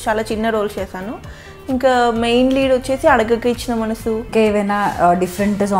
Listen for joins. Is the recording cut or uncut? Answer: cut